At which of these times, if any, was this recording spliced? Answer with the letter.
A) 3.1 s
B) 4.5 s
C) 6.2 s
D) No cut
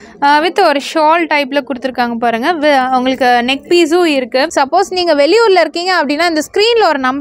B